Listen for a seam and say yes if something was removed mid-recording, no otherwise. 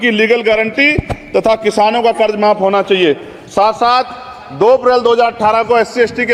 no